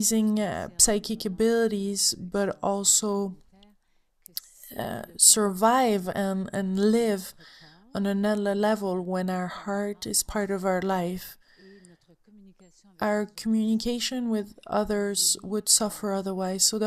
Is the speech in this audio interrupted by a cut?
no; 0 cuts

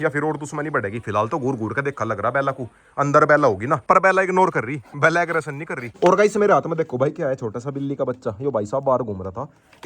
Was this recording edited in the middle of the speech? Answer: yes; 2 cuts; at 3.9 s, 5.9 s

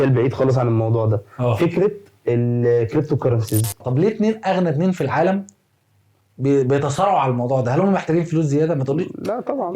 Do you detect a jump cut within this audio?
yes; 1 cut; at 3.8 s

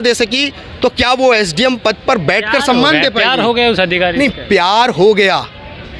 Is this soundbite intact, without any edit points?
yes; 0 cuts

